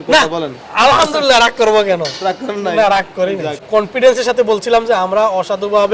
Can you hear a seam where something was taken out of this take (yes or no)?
yes